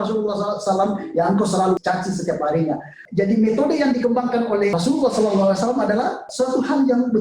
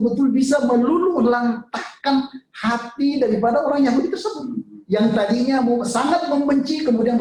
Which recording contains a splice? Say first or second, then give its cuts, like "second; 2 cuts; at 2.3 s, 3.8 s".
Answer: first; 4 cuts; at 1.8 s, 2.9 s, 4.8 s, 6.3 s